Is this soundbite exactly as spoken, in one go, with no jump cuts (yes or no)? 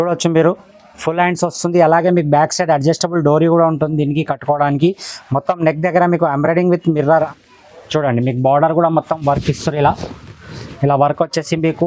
no